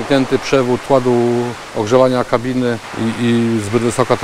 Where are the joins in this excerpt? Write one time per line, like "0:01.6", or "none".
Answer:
0:00.8
0:01.6
0:02.9